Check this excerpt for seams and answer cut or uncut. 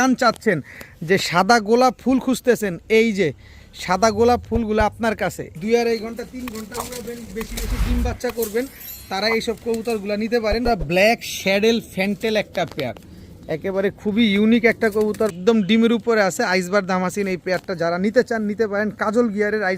cut